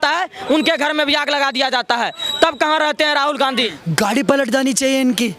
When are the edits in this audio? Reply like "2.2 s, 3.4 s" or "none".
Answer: 3.8 s